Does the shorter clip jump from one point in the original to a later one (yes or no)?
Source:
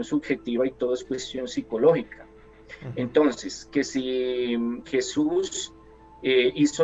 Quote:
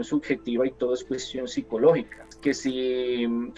yes